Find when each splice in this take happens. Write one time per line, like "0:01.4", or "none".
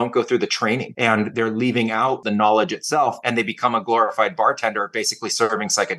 0:00.9
0:02.2
0:03.2